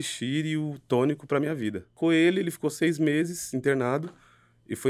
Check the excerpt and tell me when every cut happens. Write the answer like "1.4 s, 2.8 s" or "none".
2.0 s